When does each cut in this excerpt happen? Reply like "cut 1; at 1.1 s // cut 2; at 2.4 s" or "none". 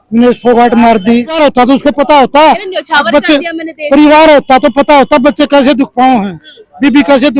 cut 1; at 1.4 s